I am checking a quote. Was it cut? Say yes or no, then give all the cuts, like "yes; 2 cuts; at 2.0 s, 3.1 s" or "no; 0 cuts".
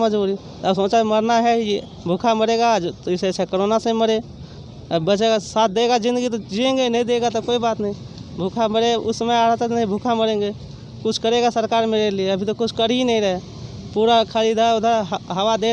no; 0 cuts